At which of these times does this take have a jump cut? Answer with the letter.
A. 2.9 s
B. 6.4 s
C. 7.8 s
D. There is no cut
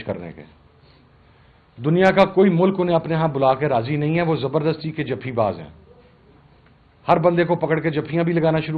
D